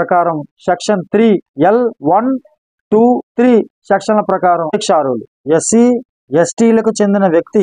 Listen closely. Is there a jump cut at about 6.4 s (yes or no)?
no